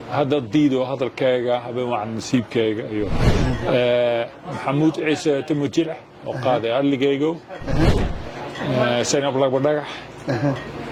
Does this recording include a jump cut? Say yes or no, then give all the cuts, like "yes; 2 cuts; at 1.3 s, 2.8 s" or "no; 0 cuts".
no; 0 cuts